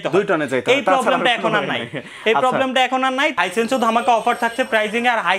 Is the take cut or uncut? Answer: cut